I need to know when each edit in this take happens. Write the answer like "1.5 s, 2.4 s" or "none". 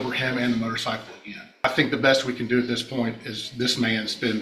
1.6 s